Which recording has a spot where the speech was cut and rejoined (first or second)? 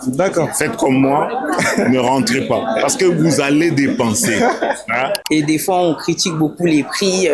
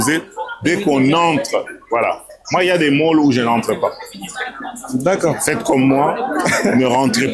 first